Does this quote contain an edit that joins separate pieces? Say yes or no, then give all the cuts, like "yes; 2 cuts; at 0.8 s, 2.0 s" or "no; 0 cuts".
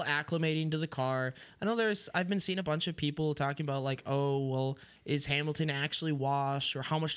no; 0 cuts